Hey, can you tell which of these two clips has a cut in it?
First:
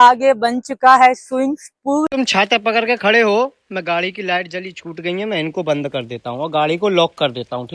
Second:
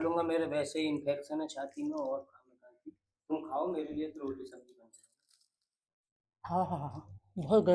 first; 1 cut; at 2.1 s

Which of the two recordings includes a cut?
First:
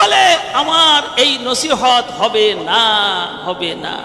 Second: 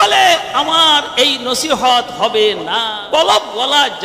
second; 1 cut; at 2.9 s

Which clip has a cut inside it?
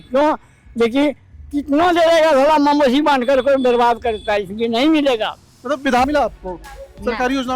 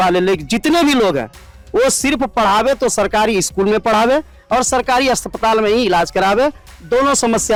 first; 1 cut; at 6.0 s

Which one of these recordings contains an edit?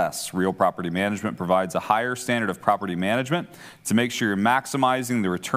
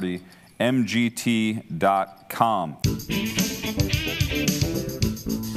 second; 1 cut; at 2.8 s

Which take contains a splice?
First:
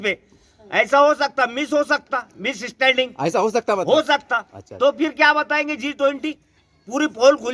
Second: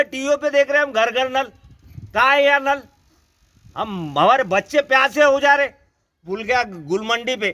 second; 1 cut; at 6.2 s

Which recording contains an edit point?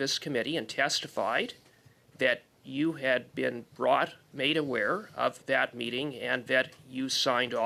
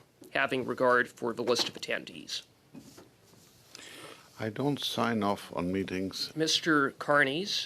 second; 1 cut; at 6.3 s

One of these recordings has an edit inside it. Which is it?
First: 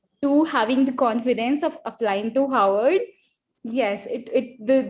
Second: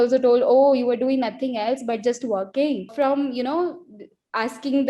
second; 1 cut; at 2.9 s

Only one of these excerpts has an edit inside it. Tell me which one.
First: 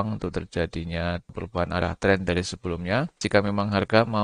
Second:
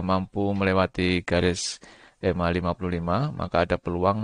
first; 2 cuts; at 1.3 s, 3.2 s

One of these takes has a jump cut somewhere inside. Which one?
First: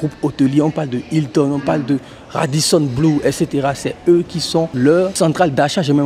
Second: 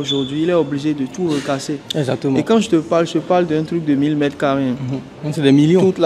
first; 1 cut; at 4.8 s

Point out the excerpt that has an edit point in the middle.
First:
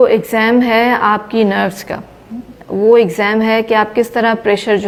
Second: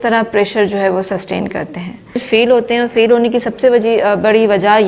second; 1 cut; at 2.2 s

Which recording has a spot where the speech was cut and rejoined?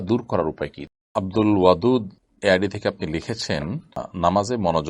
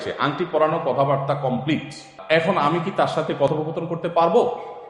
first; 3 cuts; at 1.1 s, 2.2 s, 4.1 s

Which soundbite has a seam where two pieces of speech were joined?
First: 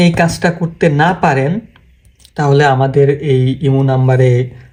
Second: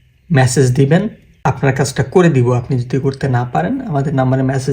second; 1 cut; at 1.2 s

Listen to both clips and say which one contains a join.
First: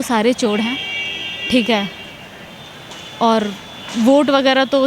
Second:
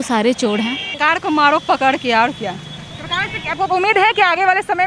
second; 1 cut; at 1.0 s

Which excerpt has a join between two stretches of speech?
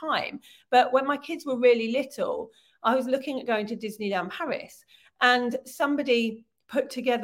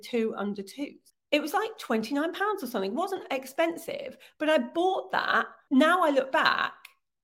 second; 2 cuts; at 1.1 s, 5.6 s

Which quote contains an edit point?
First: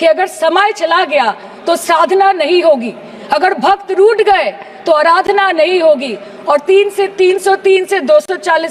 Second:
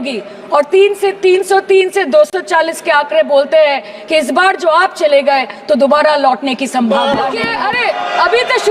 second; 1 cut; at 7.5 s

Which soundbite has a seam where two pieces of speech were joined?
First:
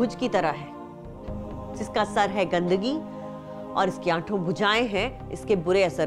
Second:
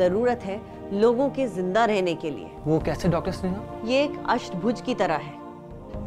second; 2 cuts; at 2.5 s, 3.7 s

